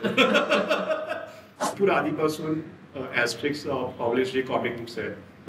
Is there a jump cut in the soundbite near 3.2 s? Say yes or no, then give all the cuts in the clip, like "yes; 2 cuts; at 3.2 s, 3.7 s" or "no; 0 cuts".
no; 1 cut; at 1.6 s